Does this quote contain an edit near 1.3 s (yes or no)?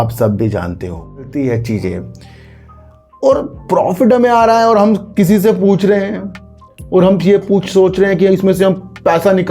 yes